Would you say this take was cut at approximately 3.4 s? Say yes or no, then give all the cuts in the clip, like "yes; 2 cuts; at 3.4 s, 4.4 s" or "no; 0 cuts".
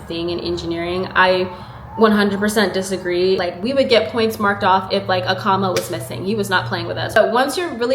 yes; 2 cuts; at 3.4 s, 7.2 s